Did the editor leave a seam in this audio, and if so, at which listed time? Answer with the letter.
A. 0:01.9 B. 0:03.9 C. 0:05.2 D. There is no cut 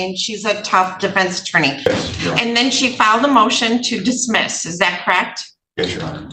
A